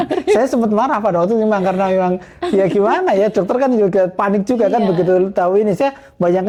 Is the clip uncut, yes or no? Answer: yes